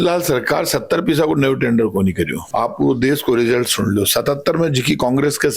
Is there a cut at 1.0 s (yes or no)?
no